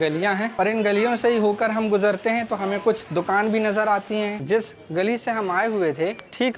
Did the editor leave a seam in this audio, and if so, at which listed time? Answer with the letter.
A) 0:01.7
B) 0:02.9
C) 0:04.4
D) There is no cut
C